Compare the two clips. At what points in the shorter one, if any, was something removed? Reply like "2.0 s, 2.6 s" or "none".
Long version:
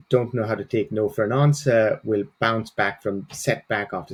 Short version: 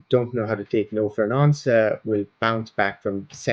none